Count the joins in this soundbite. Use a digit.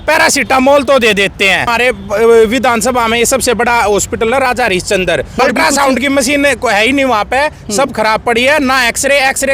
2